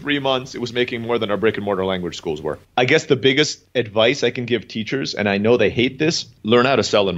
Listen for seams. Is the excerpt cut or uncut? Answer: cut